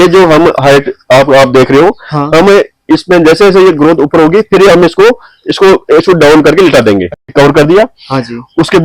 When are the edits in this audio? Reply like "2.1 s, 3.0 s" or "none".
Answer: 7.2 s